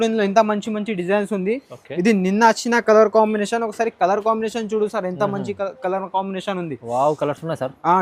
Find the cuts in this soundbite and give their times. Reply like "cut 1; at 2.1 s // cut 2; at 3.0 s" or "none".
none